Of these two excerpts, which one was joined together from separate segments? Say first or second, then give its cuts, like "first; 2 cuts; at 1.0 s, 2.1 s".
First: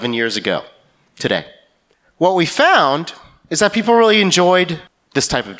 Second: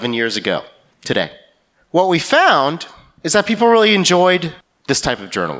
second; 1 cut; at 1.2 s